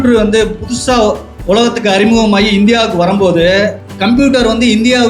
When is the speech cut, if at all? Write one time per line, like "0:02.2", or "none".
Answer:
0:01.3
0:03.8

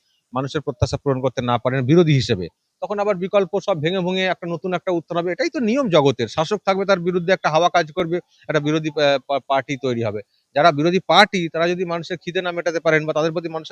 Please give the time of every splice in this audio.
none

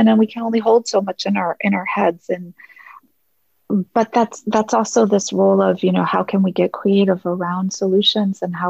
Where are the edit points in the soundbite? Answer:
0:02.9

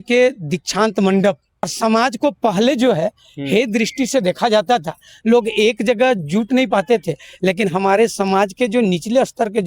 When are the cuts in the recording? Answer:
0:01.7

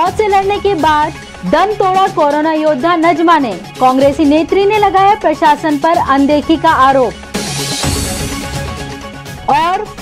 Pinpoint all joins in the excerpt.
none

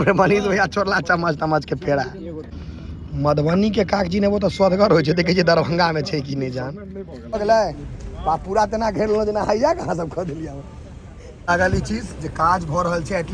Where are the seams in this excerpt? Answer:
0:02.5
0:07.3
0:11.5

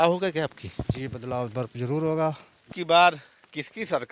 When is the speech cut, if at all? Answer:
0:02.7

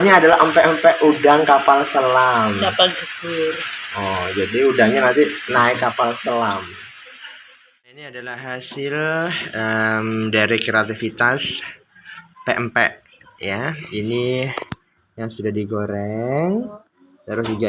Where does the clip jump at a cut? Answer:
0:07.7

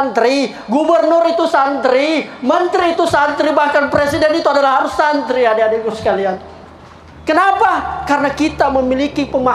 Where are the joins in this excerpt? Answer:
none

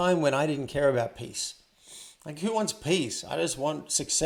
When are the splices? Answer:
none

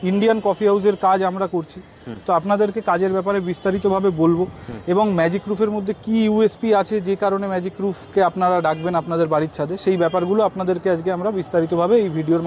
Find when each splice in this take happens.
none

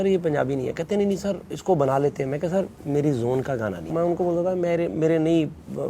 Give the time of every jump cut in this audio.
0:03.8

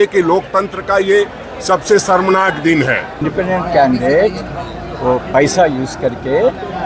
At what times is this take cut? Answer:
0:03.2

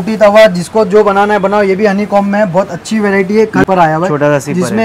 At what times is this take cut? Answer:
0:03.6

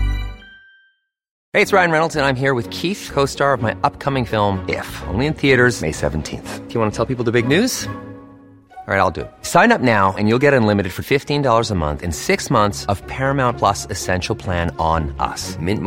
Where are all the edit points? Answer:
0:01.3

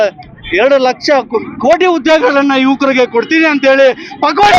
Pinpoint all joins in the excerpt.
none

